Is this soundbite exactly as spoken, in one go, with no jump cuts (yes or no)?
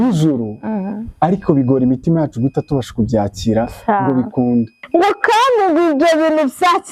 no